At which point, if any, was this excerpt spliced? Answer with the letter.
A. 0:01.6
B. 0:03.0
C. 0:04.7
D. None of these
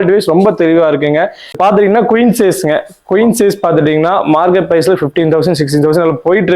A